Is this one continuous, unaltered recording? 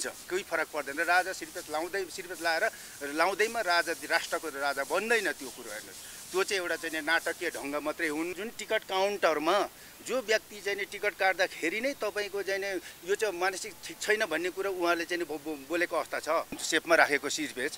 no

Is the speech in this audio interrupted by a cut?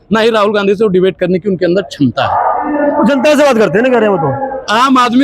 no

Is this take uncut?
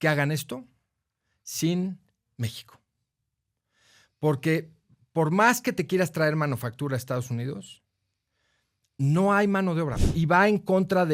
no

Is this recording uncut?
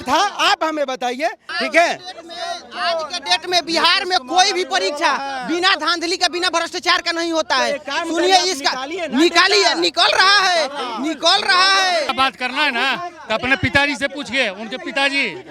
no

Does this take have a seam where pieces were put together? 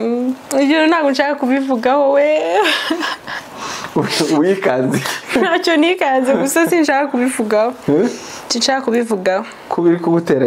no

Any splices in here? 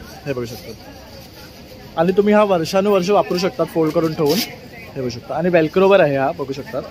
no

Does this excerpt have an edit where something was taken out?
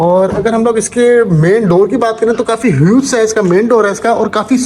no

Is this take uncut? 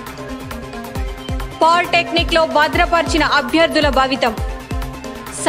no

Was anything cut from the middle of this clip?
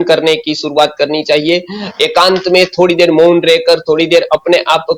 no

